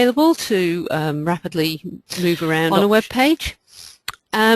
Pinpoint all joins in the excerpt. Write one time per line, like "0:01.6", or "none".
0:02.7

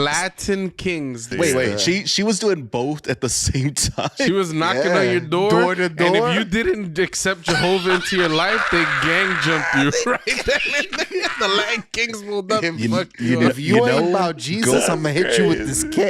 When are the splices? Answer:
0:01.3

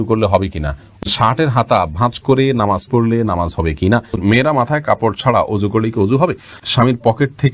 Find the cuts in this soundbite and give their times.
0:01.0
0:04.2
0:06.6

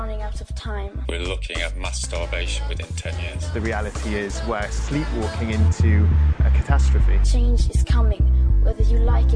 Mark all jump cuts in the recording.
none

